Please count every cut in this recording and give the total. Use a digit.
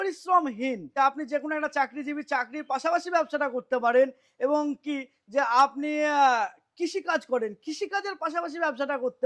1